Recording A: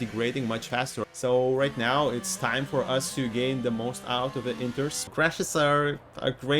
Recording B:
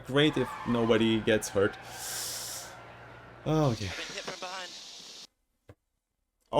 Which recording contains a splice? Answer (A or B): A